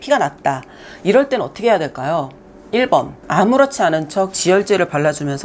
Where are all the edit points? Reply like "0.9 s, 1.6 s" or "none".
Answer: 3.2 s